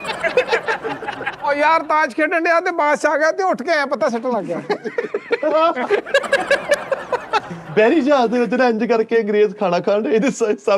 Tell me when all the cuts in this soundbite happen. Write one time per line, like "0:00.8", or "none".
0:01.3
0:07.5